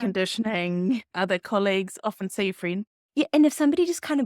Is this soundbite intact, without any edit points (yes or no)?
no